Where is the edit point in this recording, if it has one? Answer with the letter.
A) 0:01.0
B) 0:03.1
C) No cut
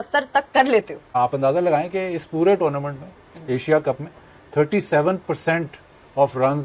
A